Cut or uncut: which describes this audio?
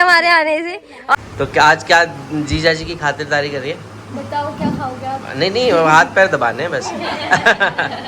cut